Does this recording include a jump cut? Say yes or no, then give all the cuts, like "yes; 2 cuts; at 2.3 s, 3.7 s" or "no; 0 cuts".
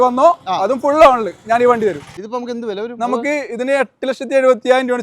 yes; 1 cut; at 2.1 s